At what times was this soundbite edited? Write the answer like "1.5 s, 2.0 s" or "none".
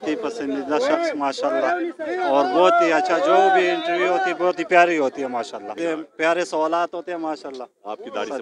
5.7 s

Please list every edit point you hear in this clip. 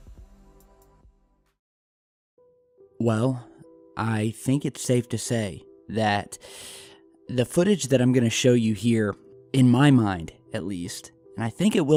none

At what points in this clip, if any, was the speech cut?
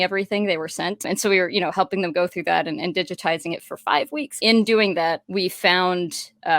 1.0 s, 4.3 s, 5.2 s

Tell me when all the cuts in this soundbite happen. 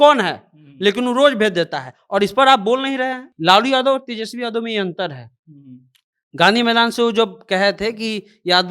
3.3 s

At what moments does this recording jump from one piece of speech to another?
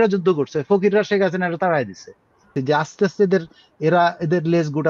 2.5 s

